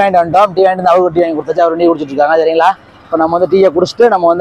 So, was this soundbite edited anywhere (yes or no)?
no